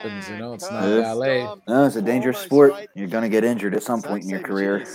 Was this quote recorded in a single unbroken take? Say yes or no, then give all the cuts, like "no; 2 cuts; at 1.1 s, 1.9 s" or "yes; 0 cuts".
no; 2 cuts; at 1.6 s, 2.9 s